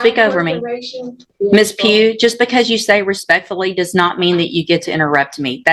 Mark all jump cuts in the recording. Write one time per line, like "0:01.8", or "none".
0:01.2